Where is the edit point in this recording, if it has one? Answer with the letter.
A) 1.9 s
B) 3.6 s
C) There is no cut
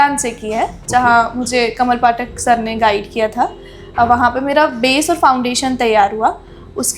C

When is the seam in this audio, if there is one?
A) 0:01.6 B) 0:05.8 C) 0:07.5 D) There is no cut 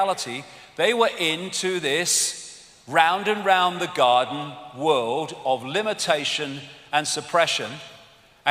A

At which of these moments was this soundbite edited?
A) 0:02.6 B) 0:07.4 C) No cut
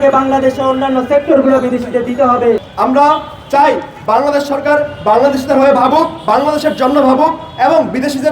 A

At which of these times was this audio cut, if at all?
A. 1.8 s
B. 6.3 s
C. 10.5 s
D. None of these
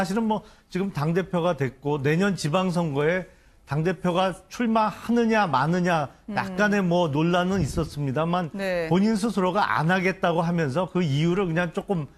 C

